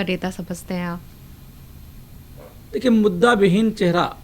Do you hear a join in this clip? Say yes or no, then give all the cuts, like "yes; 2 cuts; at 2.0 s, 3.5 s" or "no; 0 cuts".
no; 0 cuts